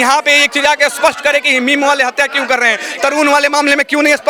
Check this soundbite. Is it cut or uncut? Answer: uncut